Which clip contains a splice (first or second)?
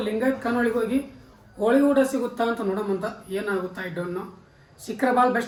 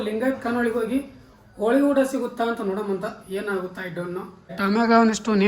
second